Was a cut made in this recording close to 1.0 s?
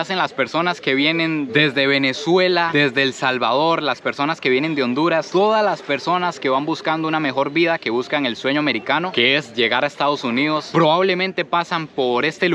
no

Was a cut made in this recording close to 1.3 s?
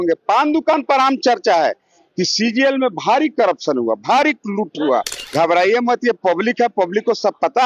no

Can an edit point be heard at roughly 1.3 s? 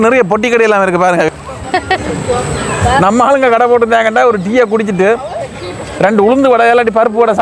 yes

